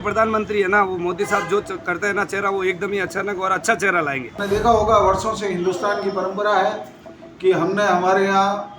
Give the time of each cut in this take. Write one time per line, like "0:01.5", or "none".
0:04.4